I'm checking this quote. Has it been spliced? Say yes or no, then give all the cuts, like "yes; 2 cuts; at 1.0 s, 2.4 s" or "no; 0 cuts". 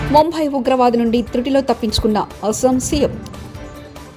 no; 0 cuts